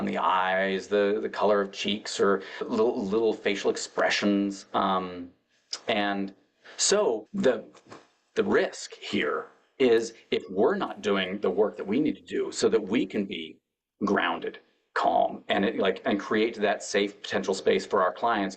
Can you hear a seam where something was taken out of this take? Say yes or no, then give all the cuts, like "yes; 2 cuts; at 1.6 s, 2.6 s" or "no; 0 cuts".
yes; 2 cuts; at 2.7 s, 7.3 s